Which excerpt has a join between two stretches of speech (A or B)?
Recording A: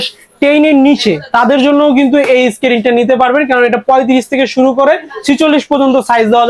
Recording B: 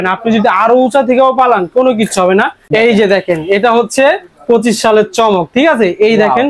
B